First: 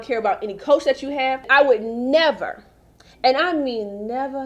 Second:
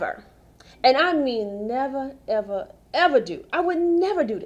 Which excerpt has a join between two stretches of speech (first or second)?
first